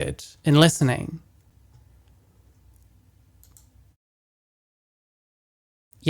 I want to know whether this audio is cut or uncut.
uncut